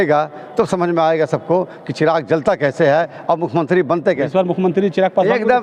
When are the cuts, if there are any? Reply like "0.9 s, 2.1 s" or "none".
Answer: 4.2 s